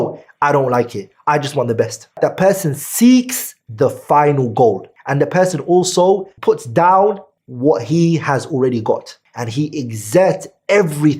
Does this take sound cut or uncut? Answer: uncut